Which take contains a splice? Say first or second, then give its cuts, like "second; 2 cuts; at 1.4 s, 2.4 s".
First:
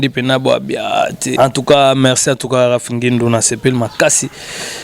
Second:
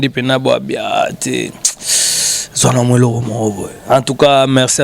first; 1 cut; at 1.2 s